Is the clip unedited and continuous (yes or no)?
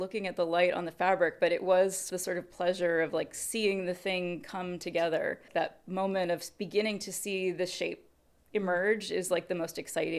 no